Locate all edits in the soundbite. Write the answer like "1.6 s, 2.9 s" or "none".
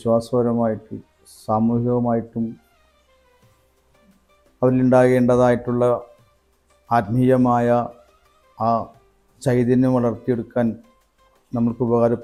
none

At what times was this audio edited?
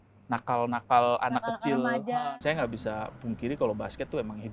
2.1 s

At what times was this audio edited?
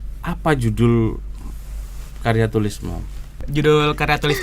3.4 s

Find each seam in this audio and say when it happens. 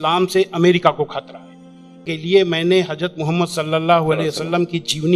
2.1 s

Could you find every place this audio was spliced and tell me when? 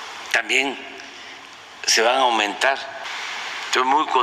2.9 s

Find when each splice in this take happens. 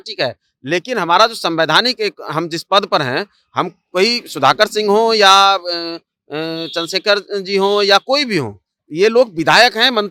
none

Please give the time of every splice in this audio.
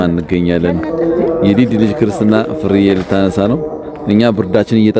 none

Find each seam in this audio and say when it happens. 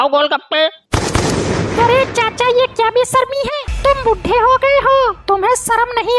3.6 s

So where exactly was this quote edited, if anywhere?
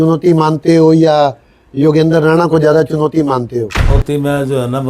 3.9 s

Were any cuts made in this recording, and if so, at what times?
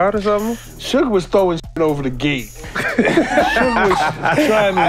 none

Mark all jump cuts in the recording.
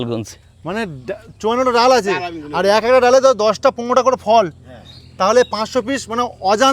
none

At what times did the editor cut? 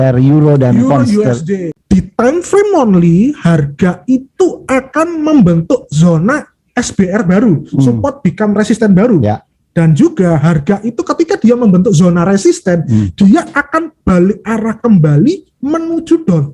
1.7 s

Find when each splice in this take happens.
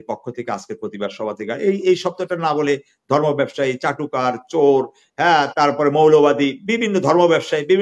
none

